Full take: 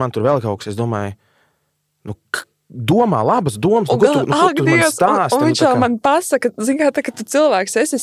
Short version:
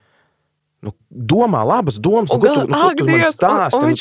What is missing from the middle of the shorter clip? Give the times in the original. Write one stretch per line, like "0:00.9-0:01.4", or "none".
0:02.3-0:02.6